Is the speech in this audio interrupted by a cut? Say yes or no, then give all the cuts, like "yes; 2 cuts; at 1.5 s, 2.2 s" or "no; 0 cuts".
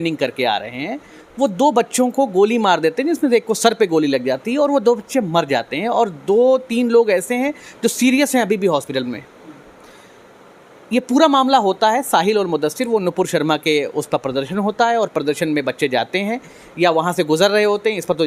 no; 0 cuts